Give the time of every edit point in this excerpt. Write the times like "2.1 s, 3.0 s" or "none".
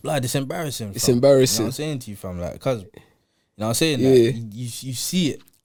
none